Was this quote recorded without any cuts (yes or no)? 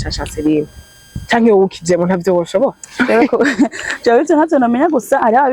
yes